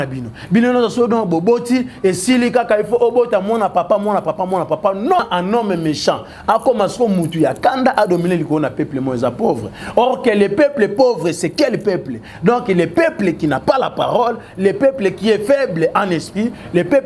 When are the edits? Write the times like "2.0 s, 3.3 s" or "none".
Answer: 5.2 s